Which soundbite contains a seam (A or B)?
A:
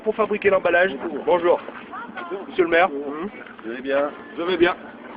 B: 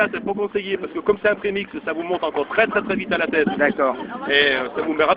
A